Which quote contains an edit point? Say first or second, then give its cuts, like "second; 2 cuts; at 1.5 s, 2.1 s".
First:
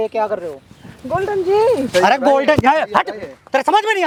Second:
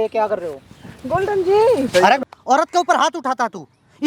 second; 1 cut; at 2.2 s